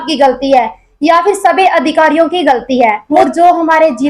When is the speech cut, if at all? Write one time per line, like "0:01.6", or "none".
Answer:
0:03.1